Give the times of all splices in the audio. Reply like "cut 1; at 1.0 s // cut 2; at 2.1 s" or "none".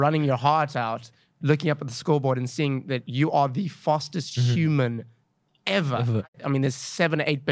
cut 1; at 6.3 s